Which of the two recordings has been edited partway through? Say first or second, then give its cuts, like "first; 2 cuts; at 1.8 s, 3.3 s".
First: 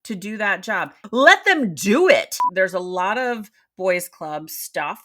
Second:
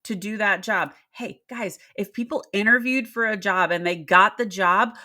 first; 2 cuts; at 1.0 s, 2.4 s